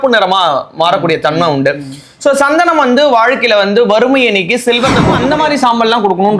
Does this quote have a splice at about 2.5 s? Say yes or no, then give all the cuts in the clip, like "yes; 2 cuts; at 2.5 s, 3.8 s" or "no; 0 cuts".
no; 1 cut; at 5.2 s